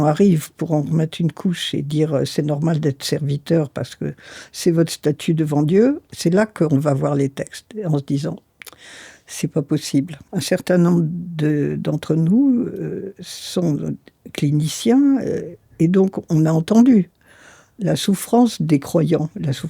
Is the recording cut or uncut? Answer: cut